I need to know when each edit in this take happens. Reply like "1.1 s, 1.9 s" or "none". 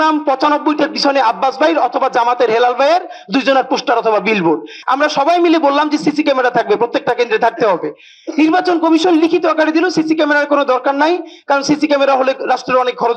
4.7 s